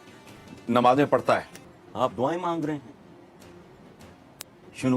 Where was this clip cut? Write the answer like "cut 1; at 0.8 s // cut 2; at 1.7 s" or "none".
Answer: cut 1; at 1.6 s